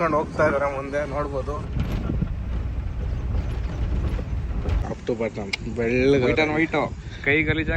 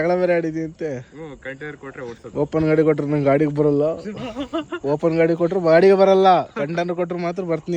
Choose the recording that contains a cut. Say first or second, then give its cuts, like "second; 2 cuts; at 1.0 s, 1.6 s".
first; 1 cut; at 4.8 s